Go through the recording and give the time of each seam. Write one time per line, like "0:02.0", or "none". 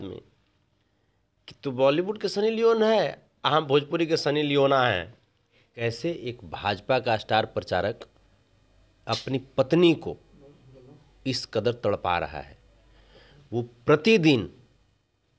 0:05.8